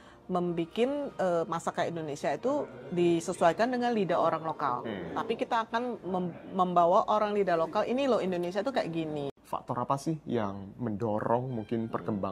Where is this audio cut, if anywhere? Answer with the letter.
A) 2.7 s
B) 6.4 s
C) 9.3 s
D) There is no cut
C